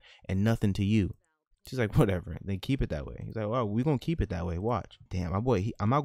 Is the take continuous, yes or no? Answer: yes